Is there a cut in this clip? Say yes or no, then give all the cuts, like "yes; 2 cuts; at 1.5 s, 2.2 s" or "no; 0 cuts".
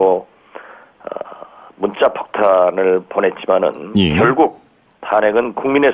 yes; 1 cut; at 3.9 s